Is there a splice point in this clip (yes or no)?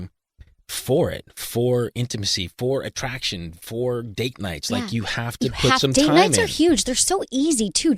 no